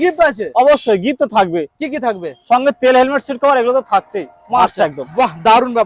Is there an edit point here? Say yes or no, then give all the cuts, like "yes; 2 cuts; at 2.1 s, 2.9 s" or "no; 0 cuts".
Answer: no; 0 cuts